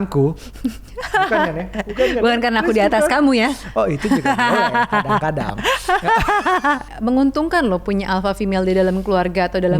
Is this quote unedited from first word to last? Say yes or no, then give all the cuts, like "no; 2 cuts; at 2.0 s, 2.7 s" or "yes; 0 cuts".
no; 1 cut; at 6.9 s